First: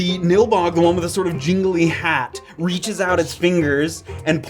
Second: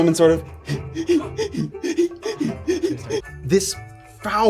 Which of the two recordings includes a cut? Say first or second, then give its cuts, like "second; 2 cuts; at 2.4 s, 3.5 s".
second; 1 cut; at 3.2 s